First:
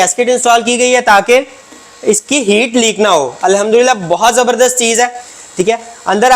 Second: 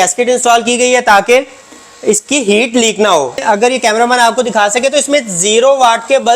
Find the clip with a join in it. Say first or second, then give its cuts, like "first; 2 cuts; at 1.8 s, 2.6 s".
second; 1 cut; at 3.4 s